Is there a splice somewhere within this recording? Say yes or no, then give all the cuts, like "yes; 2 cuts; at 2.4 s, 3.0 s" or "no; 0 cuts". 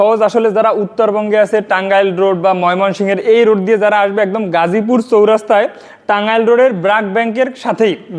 no; 0 cuts